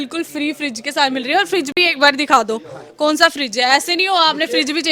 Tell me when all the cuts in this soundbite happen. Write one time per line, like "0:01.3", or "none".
none